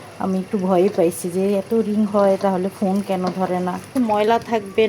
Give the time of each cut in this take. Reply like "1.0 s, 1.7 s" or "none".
3.9 s